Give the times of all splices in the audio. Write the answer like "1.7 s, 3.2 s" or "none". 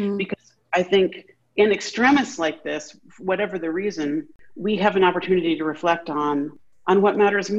4.4 s, 6.6 s